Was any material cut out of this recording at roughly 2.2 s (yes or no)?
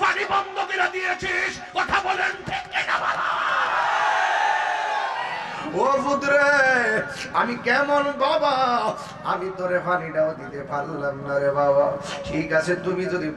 no